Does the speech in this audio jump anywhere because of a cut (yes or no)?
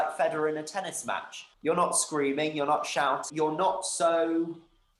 yes